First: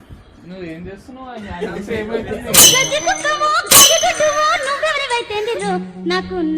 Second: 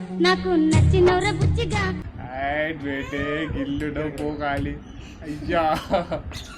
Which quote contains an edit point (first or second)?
second